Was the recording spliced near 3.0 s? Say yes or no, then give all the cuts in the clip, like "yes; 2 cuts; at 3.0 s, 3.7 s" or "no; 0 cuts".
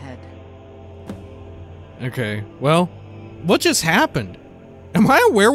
no; 1 cut; at 1.6 s